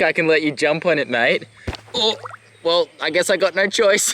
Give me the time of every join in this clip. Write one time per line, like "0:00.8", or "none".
none